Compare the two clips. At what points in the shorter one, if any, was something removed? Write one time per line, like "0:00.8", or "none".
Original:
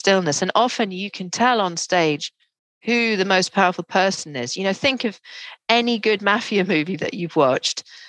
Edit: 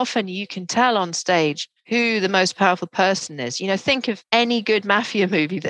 0:01.7
0:04.2